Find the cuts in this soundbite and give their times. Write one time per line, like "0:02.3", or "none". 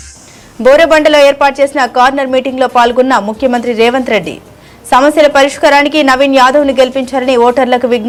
none